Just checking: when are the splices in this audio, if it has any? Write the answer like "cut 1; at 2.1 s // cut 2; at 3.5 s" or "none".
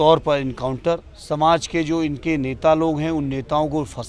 cut 1; at 1.1 s